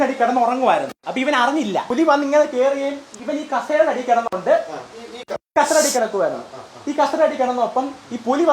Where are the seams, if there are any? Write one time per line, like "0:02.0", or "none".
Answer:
0:01.9
0:03.1